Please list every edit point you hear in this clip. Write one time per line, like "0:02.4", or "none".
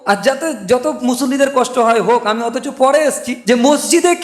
0:03.3